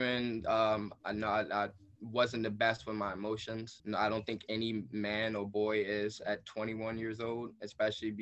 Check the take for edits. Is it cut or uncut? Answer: cut